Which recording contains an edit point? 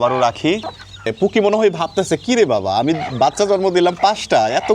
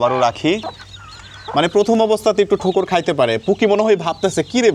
first; 1 cut; at 1.1 s

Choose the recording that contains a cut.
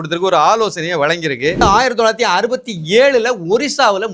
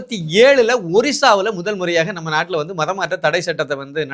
first; 1 cut; at 1.6 s

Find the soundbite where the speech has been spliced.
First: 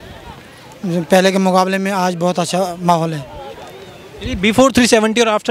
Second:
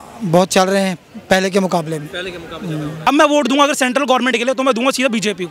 second; 1 cut; at 3.1 s

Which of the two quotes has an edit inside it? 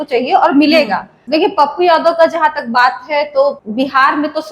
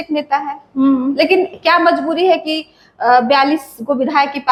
first; 2 cuts; at 1.2 s, 3.6 s

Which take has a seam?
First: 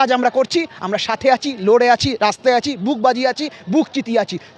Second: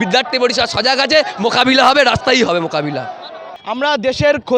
second; 1 cut; at 3.5 s

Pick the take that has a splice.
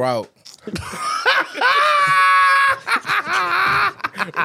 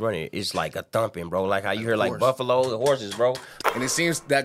second; 1 cut; at 3.5 s

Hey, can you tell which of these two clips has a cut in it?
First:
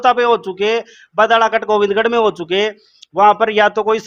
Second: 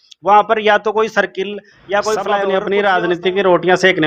second; 1 cut; at 2.3 s

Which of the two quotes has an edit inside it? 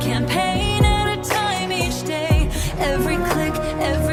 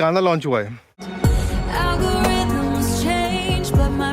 second; 1 cut; at 1.0 s

